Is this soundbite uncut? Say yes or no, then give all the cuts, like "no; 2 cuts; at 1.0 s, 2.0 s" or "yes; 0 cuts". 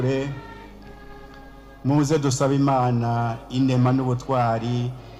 yes; 0 cuts